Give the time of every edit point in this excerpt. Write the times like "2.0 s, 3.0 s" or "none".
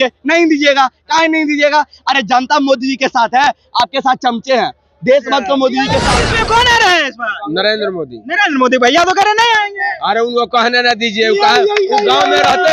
6.2 s